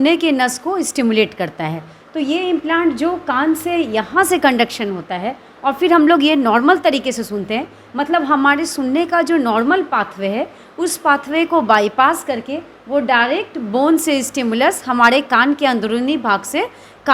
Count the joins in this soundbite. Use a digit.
0